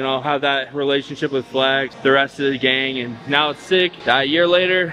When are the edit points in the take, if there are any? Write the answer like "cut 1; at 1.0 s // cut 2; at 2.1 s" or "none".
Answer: cut 1; at 1.9 s // cut 2; at 4.0 s